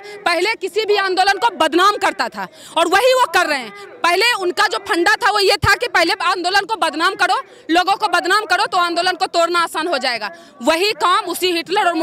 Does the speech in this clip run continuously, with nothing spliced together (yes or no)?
yes